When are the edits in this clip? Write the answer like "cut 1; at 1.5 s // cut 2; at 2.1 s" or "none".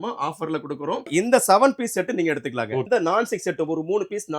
cut 1; at 1.1 s // cut 2; at 2.9 s